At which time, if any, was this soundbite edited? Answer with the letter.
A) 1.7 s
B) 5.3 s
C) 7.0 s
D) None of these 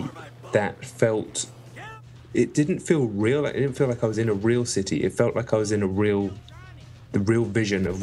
C